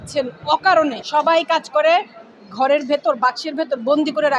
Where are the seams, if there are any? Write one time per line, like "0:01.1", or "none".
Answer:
0:01.0